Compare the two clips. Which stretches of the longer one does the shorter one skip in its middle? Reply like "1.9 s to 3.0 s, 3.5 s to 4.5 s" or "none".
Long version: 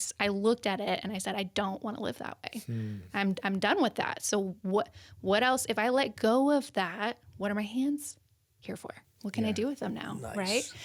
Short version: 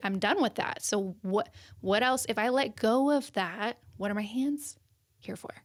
none